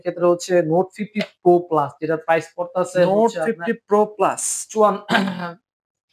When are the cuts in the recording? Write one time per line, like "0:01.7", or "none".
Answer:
none